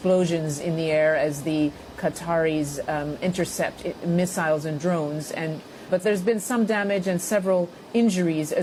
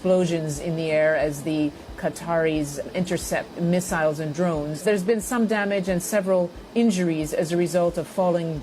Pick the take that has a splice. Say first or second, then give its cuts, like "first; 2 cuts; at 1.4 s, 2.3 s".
second; 2 cuts; at 3.2 s, 4.8 s